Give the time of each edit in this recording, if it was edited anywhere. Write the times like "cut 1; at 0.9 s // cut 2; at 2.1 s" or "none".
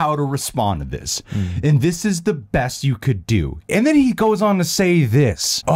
cut 1; at 3.6 s